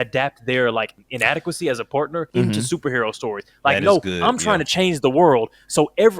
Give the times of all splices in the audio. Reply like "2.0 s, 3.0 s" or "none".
2.3 s